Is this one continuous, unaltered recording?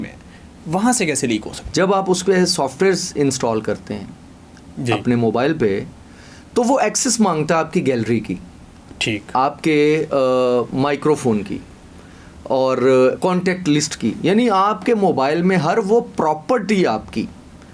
no; 1 cut; at 1.6 s

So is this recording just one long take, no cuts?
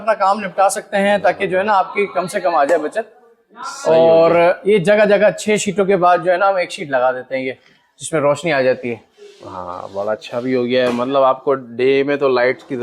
yes; 0 cuts

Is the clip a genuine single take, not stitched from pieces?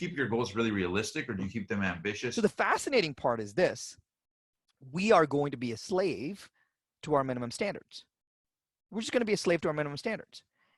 no; 1 cut; at 2.3 s

